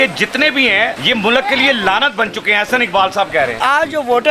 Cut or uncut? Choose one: cut